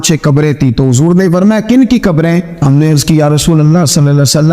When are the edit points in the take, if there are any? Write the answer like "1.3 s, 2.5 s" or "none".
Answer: 2.2 s